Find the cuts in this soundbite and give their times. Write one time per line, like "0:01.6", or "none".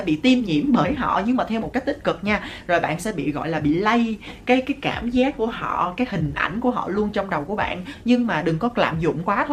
none